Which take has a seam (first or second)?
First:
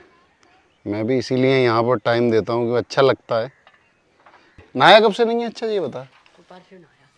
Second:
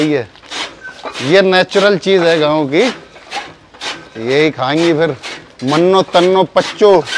first